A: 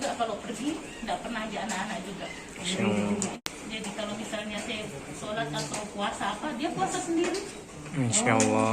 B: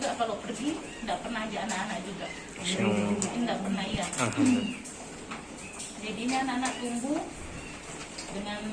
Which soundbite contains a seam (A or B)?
A